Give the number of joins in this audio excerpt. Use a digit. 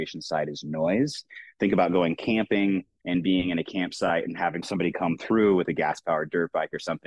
2